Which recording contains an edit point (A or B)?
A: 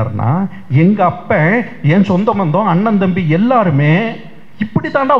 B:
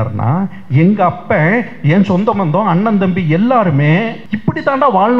B